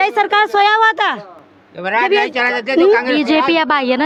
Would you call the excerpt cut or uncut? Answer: uncut